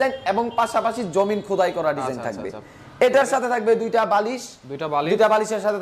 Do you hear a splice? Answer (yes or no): no